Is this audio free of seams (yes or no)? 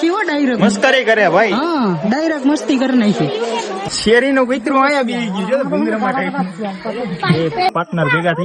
no